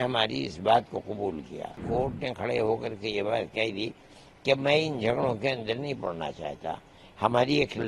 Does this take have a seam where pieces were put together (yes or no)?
yes